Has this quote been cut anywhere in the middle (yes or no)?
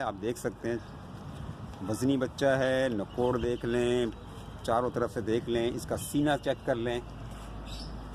no